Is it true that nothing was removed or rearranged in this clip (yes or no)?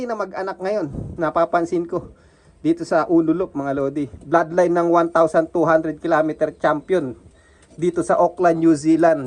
yes